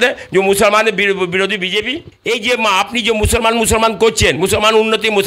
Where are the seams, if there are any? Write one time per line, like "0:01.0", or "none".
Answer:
0:02.1